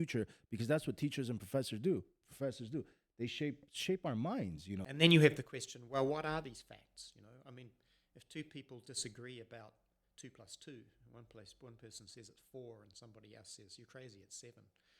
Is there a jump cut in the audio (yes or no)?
yes